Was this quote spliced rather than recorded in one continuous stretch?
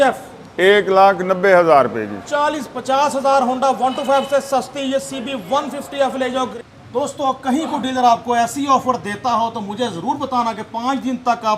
yes; 1 cut; at 6.5 s

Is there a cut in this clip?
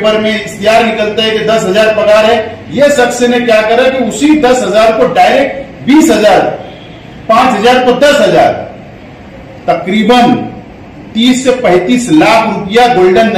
no; 0 cuts

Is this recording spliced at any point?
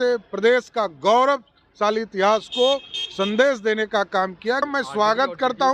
yes; 1 cut; at 4.7 s

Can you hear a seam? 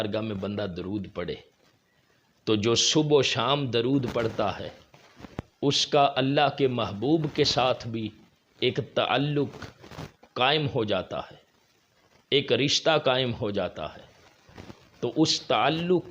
no; 0 cuts

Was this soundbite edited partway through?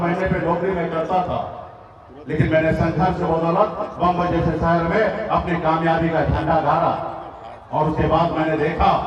no; 0 cuts

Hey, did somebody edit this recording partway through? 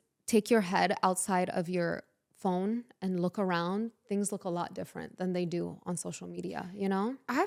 no; 0 cuts

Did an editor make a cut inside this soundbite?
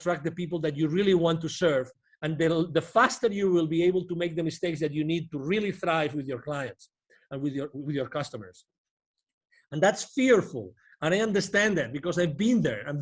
no; 0 cuts

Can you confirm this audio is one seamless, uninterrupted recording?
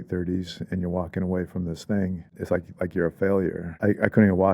no; 2 cuts; at 2.4 s, 3.7 s

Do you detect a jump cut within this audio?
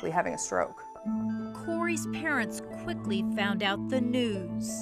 no; 0 cuts

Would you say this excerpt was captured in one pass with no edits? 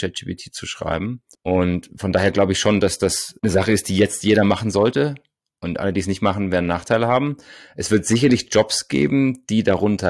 yes; 0 cuts

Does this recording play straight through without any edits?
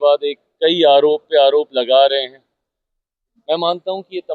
no; 1 cut; at 3.3 s

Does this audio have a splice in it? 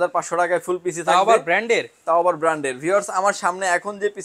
no; 0 cuts

